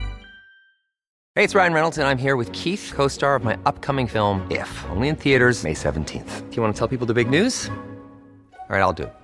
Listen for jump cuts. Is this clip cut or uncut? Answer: cut